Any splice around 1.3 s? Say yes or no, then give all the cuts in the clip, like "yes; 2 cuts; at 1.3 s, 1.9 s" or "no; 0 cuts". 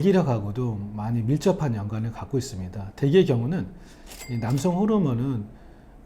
no; 0 cuts